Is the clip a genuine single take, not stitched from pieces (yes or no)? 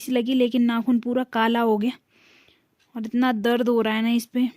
yes